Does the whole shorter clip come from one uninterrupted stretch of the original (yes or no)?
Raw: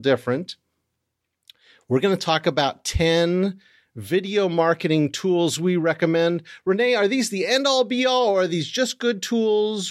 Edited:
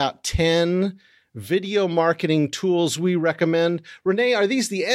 yes